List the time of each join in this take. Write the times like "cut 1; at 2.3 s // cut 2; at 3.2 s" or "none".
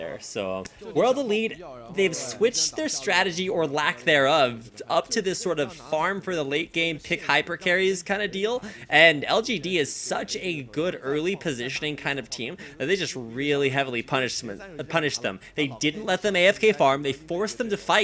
cut 1; at 9.8 s